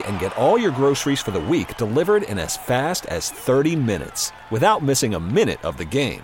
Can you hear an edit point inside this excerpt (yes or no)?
no